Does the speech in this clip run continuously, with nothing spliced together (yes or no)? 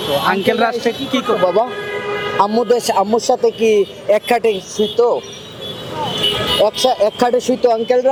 yes